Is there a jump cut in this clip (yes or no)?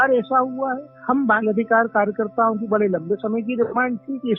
no